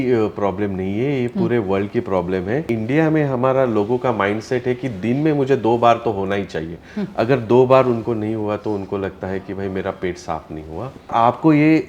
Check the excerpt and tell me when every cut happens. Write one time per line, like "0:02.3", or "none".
0:02.7
0:11.1